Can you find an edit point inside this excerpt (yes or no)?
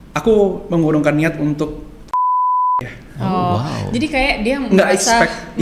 no